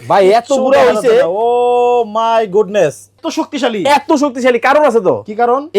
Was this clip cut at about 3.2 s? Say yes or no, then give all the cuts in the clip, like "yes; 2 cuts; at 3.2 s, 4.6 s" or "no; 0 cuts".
yes; 1 cut; at 3.2 s